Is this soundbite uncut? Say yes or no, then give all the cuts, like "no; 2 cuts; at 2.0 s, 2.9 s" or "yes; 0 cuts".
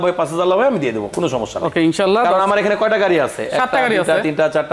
yes; 0 cuts